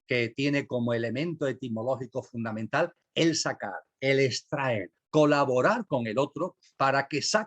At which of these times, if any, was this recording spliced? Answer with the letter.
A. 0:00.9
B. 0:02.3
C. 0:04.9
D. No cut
C